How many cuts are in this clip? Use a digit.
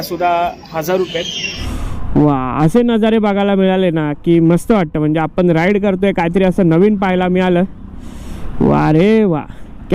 1